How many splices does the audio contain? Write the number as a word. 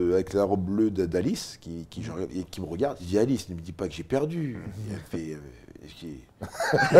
one